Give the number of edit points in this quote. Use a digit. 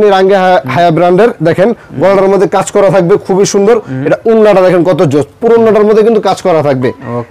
0